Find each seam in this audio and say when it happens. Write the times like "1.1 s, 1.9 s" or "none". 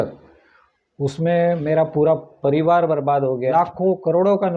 3.5 s